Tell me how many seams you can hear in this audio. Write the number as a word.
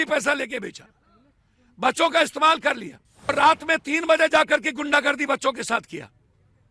one